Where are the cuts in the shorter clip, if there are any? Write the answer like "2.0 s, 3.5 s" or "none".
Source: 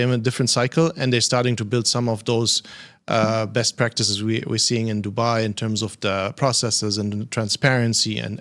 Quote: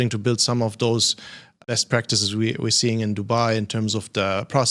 1.6 s

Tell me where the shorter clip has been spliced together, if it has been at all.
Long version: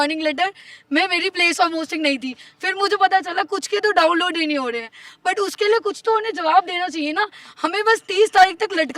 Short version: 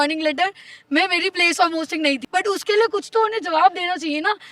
2.2 s

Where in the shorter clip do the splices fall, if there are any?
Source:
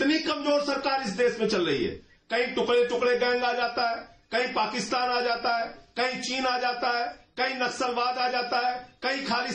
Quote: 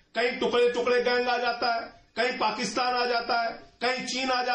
none

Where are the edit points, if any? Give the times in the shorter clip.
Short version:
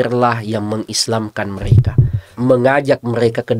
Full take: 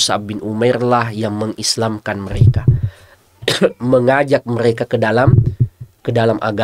2.3 s

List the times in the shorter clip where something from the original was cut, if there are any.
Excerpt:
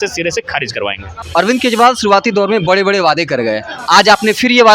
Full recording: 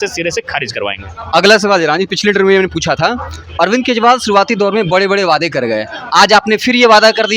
1.1 s

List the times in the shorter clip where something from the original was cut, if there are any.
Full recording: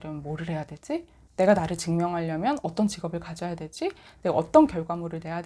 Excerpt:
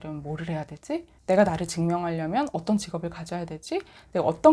1.1 s

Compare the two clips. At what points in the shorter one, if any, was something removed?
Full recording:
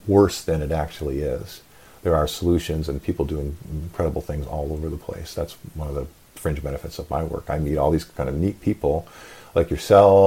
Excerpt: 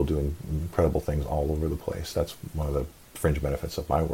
none

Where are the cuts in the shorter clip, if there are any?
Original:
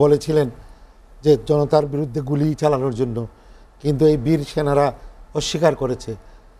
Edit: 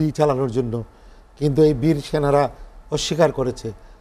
none

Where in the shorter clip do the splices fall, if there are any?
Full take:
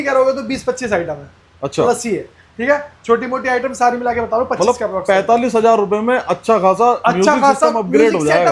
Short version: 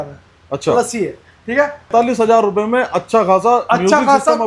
1.9 s

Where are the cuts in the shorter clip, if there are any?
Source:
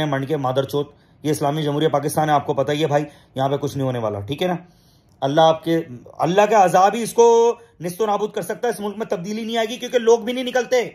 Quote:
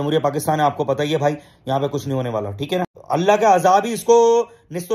3.0 s

